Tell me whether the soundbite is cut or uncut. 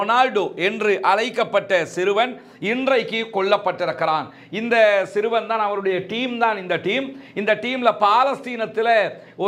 uncut